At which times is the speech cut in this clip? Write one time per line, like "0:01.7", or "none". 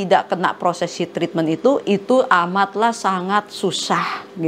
none